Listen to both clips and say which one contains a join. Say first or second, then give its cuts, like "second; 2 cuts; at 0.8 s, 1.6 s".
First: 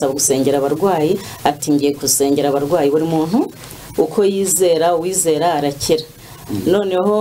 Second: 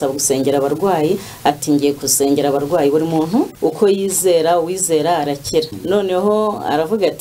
second; 2 cuts; at 3.5 s, 5.8 s